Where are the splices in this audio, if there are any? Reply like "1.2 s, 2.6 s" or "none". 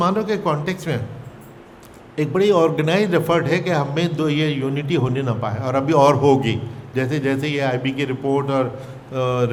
none